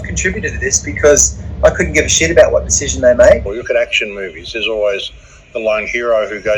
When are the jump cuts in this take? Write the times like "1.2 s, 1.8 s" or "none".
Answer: 3.5 s

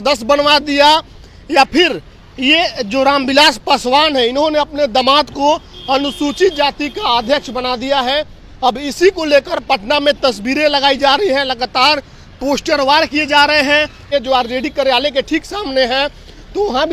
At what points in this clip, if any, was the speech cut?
14.1 s

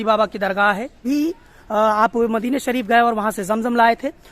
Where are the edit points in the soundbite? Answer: 1.0 s

